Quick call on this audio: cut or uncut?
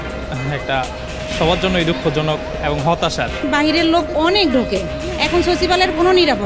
cut